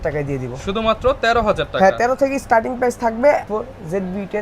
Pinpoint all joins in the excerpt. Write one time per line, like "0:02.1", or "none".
0:03.5